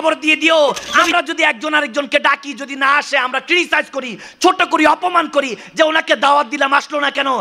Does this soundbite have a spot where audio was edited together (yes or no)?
yes